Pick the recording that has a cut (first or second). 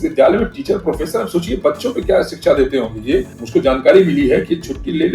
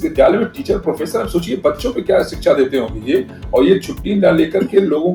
first